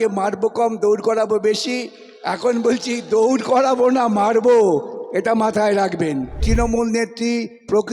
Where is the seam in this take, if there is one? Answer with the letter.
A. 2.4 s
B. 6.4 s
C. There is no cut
B